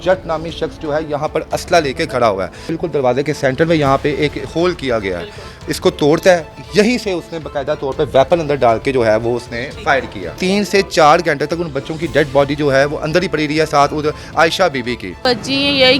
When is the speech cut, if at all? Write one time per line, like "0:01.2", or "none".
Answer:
0:02.7
0:06.6
0:10.4
0:15.2